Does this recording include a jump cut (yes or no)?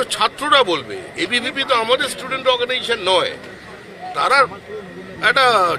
no